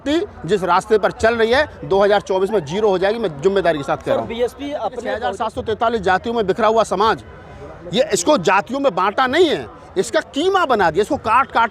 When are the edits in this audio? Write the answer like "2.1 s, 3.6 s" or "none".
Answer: 5.2 s